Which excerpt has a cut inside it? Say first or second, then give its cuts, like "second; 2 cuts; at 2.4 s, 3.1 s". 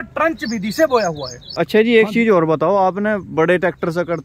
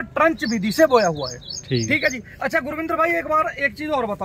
first; 1 cut; at 1.6 s